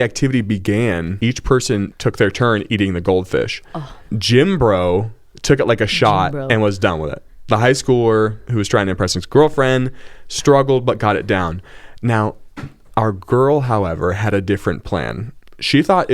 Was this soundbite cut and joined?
yes; 3 cuts; at 1.1 s, 1.9 s, 4.0 s

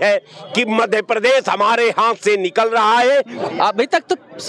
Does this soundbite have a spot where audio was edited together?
yes; 1 cut; at 3.4 s

